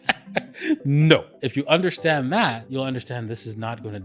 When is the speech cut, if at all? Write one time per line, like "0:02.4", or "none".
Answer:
0:01.4
0:02.6

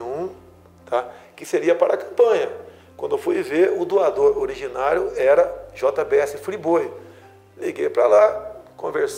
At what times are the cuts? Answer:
none

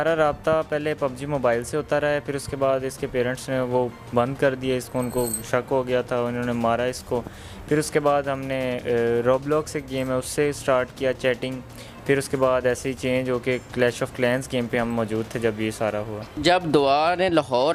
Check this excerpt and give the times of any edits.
none

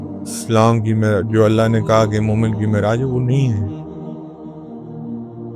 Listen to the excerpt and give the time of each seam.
0:03.5

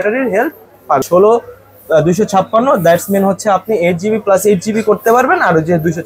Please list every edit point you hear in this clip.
0:01.0

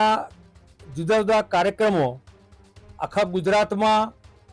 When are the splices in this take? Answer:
none

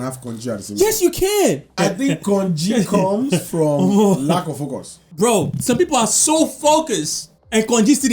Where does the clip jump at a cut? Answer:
0:01.7

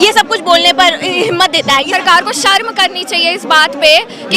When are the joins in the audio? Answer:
0:01.9

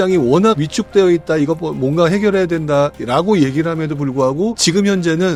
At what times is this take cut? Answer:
none

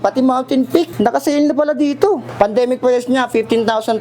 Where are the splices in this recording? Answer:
0:00.9
0:02.3

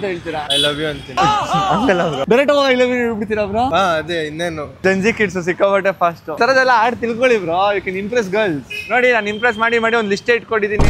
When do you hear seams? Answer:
0:00.8
0:02.2
0:04.8
0:06.3

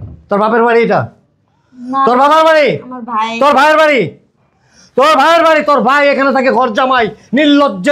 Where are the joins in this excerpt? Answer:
none

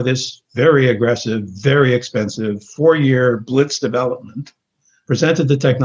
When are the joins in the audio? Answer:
none

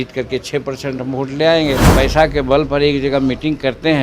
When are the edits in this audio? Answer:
0:01.9

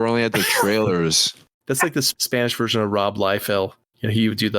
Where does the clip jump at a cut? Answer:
0:01.9

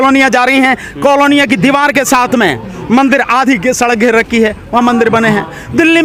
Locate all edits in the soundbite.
none

